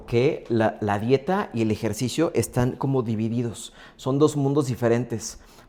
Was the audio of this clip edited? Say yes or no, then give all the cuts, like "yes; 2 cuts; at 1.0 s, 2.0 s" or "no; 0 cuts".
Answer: no; 0 cuts